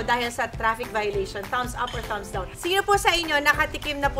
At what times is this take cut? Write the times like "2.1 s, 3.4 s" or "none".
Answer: 2.5 s